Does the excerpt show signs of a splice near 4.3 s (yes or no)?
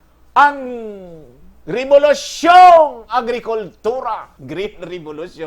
yes